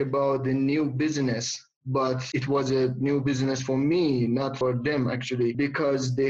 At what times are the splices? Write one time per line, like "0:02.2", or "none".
0:02.2
0:04.5
0:05.5